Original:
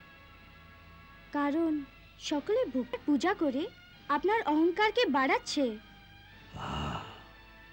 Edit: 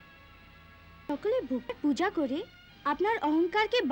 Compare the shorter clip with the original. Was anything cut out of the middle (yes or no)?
yes